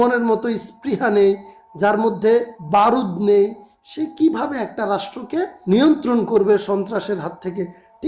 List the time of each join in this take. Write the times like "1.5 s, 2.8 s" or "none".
2.6 s, 5.6 s